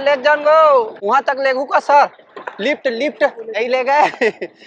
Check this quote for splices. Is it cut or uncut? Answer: cut